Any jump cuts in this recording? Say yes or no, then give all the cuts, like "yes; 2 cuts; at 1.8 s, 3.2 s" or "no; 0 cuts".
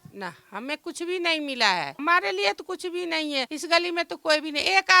yes; 2 cuts; at 1.9 s, 3.5 s